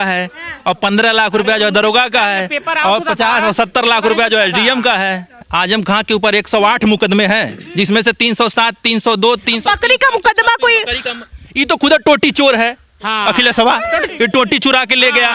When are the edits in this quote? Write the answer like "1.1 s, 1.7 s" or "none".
5.4 s, 14.1 s